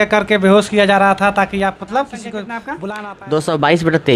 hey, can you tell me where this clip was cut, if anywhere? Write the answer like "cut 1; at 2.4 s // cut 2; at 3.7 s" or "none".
cut 1; at 2.8 s